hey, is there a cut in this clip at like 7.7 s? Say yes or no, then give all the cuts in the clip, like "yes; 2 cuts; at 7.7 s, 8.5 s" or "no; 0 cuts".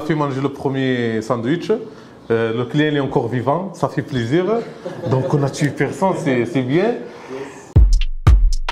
yes; 1 cut; at 7.7 s